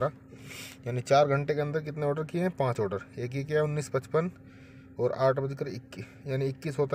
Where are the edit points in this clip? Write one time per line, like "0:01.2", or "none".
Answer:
none

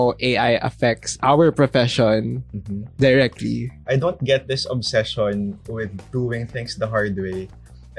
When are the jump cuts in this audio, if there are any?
0:03.7

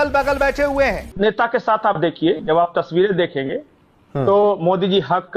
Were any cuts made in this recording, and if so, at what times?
0:01.1

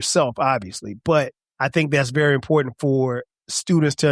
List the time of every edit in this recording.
0:01.4

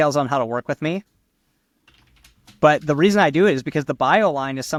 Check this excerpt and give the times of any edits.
none

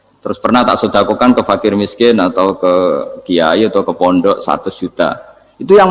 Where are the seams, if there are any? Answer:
none

